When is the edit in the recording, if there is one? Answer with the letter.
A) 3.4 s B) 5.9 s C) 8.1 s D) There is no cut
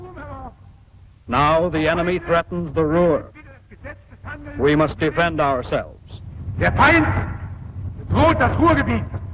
A